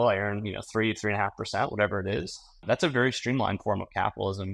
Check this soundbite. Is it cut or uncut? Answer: cut